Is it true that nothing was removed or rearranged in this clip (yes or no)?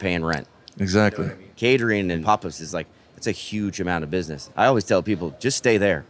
no